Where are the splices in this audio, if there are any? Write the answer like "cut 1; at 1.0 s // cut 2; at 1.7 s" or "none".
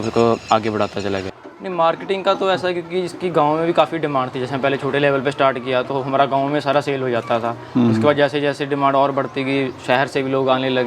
cut 1; at 1.3 s